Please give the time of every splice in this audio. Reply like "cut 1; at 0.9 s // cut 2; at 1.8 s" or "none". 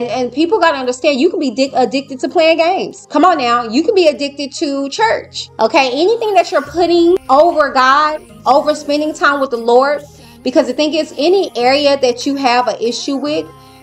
cut 1; at 3.0 s // cut 2; at 5.4 s // cut 3; at 7.2 s